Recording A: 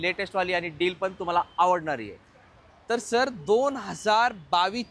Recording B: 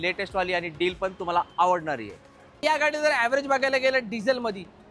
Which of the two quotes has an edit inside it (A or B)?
B